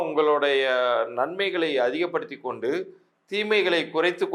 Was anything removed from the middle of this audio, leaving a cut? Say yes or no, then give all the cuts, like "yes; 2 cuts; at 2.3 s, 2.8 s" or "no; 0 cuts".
no; 0 cuts